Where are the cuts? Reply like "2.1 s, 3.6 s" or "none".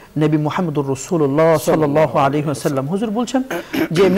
none